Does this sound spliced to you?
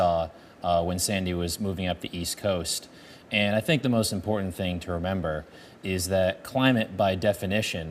yes; 1 cut; at 3.1 s

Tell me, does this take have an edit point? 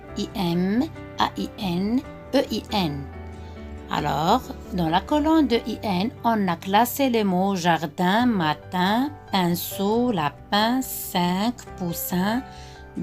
no; 0 cuts

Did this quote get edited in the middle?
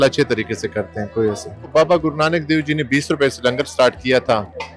yes; 1 cut; at 1.7 s

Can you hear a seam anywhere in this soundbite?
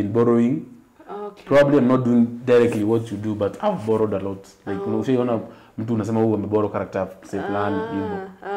no; 0 cuts

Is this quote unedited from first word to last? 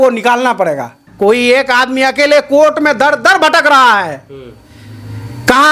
no; 1 cut; at 1.0 s

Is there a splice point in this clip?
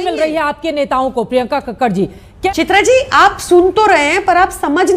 yes; 1 cut; at 2.5 s

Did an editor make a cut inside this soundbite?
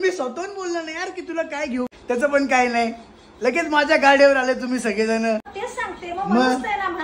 yes; 2 cuts; at 2.0 s, 5.5 s

